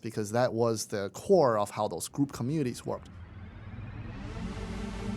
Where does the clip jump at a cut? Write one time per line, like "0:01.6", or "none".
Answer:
0:03.5